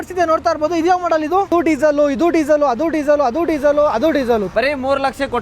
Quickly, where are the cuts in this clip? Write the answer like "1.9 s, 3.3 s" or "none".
1.5 s, 4.5 s